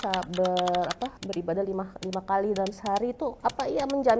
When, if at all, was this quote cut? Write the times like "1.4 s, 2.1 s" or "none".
1.2 s, 3.4 s